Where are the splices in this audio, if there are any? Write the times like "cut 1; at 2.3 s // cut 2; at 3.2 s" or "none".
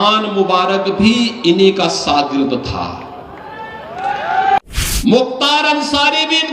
cut 1; at 4.6 s

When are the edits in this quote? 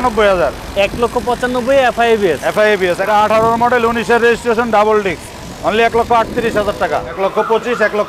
cut 1; at 3.0 s // cut 2; at 7.1 s

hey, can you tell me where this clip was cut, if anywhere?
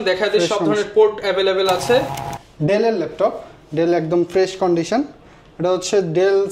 cut 1; at 2.2 s

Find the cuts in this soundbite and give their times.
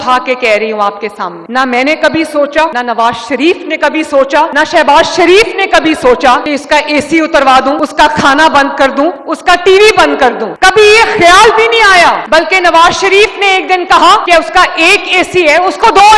none

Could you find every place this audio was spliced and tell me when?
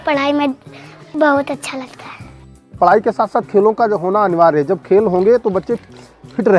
cut 1; at 1.1 s // cut 2; at 2.7 s

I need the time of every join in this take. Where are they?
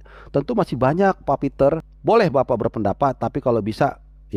cut 1; at 1.9 s

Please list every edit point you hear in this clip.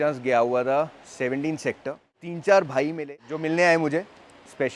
cut 1; at 2.3 s // cut 2; at 3.3 s

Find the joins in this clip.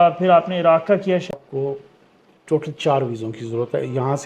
cut 1; at 1.3 s

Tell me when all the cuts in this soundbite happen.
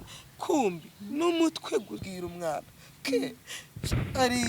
cut 1; at 2.1 s

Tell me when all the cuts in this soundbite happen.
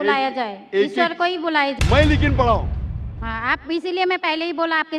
cut 1; at 1.7 s

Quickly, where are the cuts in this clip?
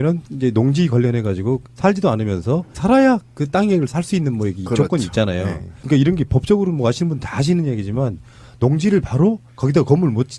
cut 1; at 1.2 s

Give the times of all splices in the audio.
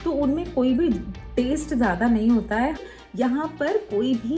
cut 1; at 2.9 s

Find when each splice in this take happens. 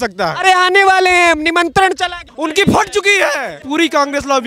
cut 1; at 2.3 s // cut 2; at 3.6 s

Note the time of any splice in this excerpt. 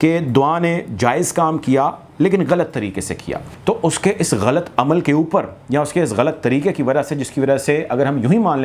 cut 1; at 3.5 s

